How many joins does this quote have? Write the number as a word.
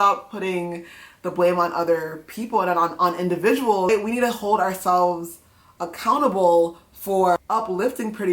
two